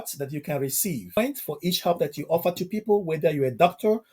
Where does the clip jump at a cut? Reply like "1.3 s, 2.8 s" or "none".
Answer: 1.2 s